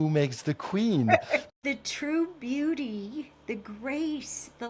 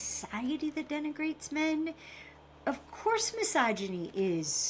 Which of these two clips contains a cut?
first; 1 cut; at 1.5 s

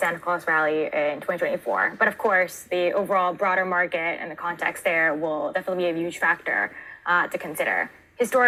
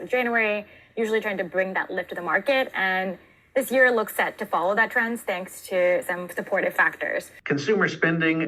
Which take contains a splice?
second; 1 cut; at 7.3 s

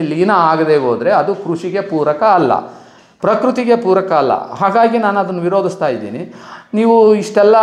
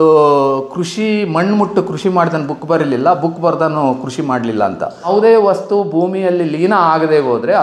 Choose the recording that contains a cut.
second; 1 cut; at 5.1 s

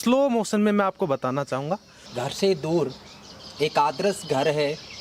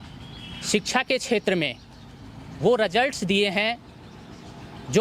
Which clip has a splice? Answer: first; 1 cut; at 2.0 s

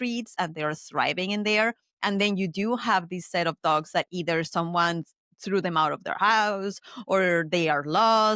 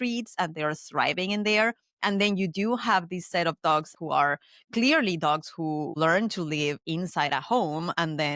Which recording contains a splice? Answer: second; 2 cuts; at 3.9 s, 6.0 s

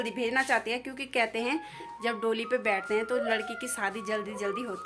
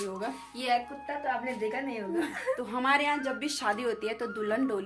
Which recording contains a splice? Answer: second; 1 cut; at 2.5 s

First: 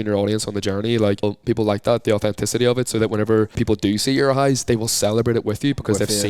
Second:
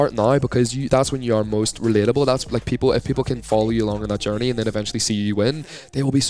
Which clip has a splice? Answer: first; 2 cuts; at 1.2 s, 3.6 s

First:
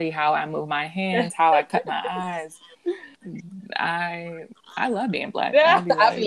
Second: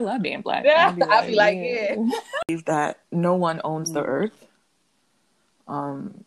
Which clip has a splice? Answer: second; 1 cut; at 2.5 s

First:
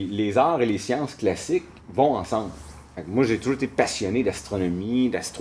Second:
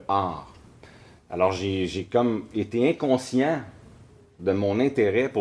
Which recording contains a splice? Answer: second; 1 cut; at 3.7 s

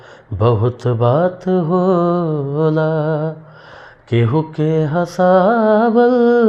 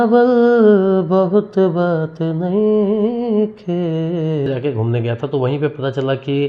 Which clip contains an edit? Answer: second; 1 cut; at 4.5 s

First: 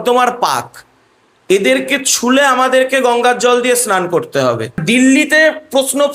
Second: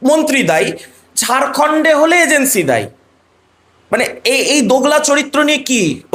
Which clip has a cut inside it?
first; 1 cut; at 4.8 s

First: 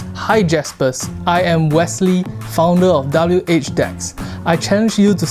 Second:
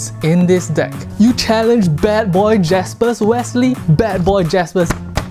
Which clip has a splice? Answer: second; 2 cuts; at 1.0 s, 3.8 s

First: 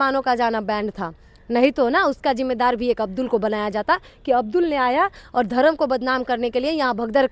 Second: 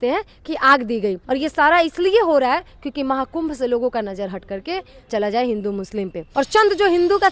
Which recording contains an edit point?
second; 3 cuts; at 1.2 s, 5.1 s, 6.2 s

